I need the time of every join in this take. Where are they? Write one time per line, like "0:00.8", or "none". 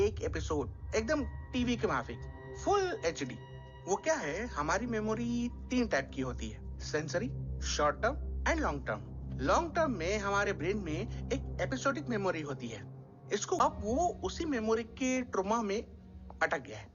0:13.6